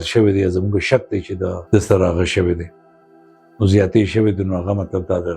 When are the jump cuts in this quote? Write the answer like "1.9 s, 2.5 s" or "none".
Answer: 1.6 s